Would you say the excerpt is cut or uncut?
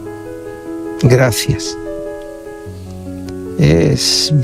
cut